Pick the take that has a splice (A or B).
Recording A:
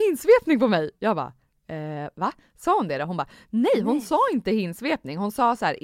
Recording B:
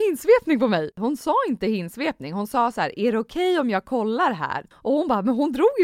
B